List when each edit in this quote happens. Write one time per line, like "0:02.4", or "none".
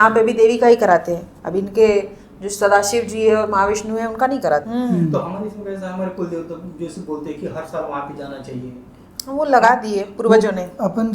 0:04.7